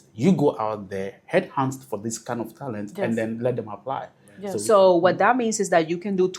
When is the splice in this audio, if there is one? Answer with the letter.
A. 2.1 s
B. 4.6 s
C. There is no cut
B